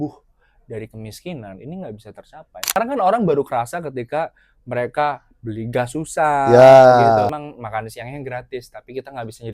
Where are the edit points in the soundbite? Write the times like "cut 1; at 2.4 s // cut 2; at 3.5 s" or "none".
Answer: cut 1; at 2.8 s // cut 2; at 7.3 s

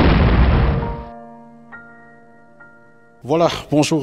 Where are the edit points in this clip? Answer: cut 1; at 3.1 s

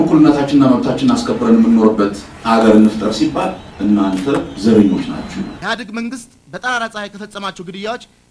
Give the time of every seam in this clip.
cut 1; at 5.4 s

